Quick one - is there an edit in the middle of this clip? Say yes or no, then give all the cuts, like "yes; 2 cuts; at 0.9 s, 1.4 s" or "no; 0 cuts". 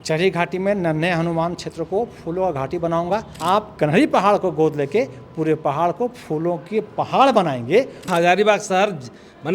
yes; 2 cuts; at 3.3 s, 8.1 s